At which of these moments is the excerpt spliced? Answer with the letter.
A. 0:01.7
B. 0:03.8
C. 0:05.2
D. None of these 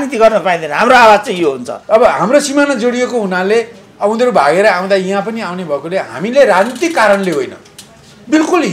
A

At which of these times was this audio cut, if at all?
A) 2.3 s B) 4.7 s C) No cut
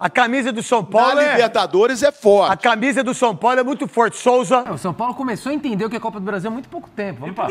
B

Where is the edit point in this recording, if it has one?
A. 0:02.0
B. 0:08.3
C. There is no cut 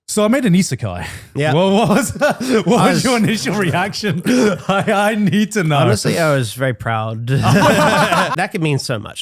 B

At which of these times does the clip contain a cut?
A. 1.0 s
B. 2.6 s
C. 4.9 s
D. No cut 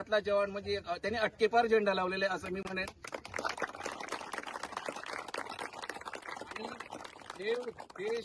D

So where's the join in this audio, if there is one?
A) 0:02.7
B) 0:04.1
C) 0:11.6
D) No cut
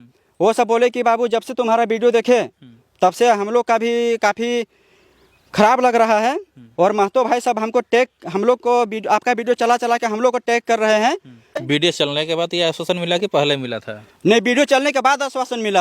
C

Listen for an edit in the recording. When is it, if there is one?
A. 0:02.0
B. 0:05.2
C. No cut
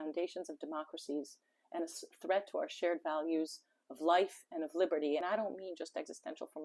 B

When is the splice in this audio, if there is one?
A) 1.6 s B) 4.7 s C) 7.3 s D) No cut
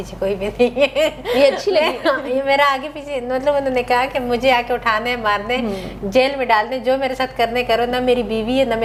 D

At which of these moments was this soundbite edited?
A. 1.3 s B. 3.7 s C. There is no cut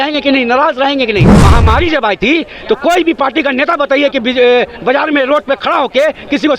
A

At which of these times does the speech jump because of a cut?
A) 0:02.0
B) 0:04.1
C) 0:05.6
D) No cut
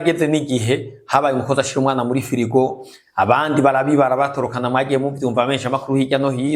D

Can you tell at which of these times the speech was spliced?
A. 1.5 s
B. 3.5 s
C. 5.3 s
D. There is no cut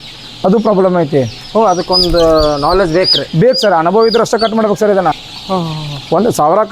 C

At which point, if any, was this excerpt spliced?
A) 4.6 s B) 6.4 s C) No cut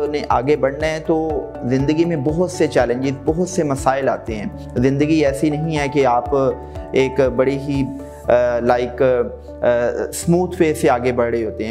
C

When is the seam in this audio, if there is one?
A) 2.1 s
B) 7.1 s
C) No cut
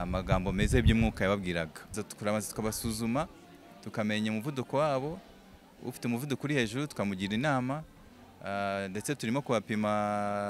A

